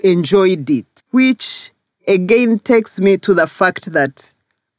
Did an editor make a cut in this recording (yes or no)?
yes